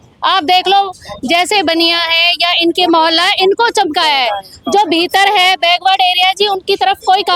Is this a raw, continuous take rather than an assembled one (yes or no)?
yes